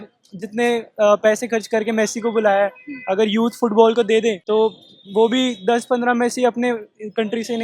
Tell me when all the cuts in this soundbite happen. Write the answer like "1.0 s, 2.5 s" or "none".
4.4 s